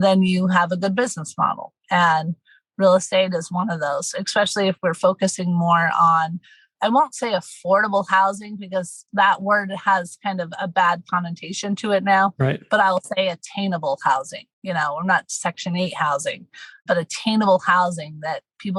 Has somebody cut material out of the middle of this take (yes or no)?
no